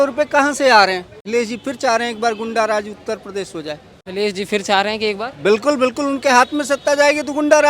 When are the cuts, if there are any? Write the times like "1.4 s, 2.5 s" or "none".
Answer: 1.2 s, 3.9 s